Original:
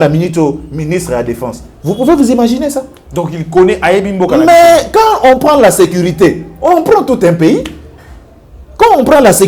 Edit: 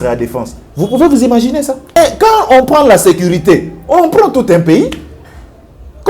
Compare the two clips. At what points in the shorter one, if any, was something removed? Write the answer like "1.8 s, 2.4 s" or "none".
2.0 s